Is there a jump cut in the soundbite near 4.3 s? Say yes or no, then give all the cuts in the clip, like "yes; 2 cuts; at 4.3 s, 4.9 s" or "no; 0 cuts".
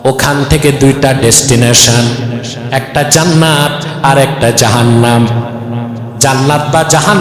no; 0 cuts